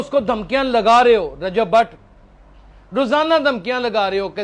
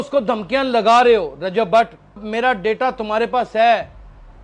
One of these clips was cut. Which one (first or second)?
second